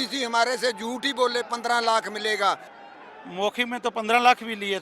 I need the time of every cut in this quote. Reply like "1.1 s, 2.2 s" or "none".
2.7 s